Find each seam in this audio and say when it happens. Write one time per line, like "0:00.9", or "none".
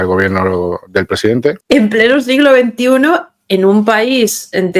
0:01.6